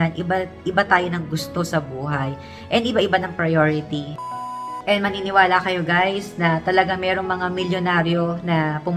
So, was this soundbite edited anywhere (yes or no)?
no